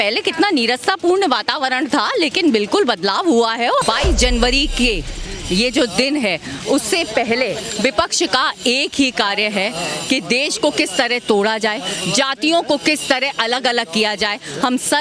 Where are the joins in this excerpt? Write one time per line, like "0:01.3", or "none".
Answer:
0:03.8